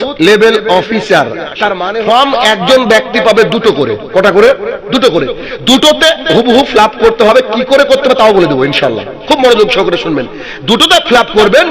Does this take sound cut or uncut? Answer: cut